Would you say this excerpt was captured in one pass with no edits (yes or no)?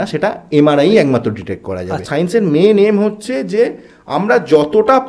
no